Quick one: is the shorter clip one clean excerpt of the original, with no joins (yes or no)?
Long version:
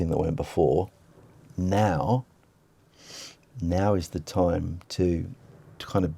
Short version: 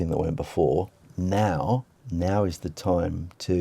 no